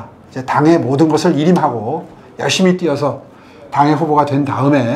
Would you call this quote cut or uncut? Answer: uncut